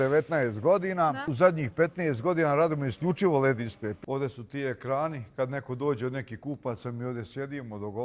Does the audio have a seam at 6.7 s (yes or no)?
no